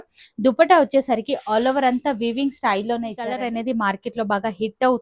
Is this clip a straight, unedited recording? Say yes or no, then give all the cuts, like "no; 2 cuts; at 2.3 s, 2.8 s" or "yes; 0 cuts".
no; 1 cut; at 3.4 s